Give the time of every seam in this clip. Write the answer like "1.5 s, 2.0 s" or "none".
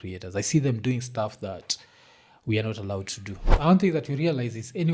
3.5 s